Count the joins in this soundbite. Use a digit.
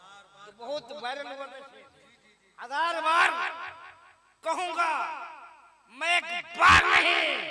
0